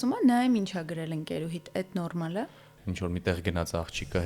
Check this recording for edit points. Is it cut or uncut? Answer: cut